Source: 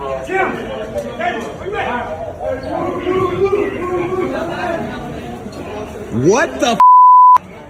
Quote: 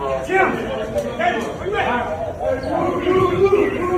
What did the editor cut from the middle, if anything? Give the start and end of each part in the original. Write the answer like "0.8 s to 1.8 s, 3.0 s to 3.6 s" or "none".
none

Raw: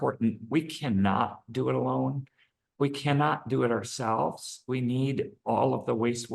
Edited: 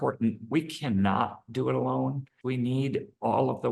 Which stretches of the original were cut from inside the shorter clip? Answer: 2.3 s to 4.5 s

